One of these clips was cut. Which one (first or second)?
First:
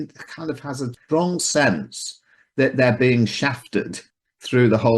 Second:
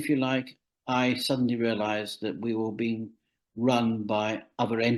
first